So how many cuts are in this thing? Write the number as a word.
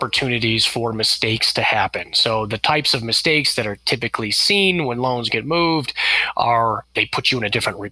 one